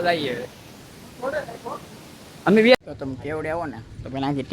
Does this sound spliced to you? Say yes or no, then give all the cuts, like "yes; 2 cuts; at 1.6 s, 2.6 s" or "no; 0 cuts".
yes; 1 cut; at 2.8 s